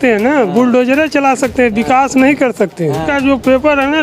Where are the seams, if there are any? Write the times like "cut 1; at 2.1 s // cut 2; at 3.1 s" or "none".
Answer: cut 1; at 3.1 s